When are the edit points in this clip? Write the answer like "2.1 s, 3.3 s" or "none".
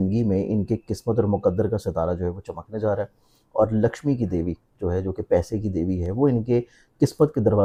none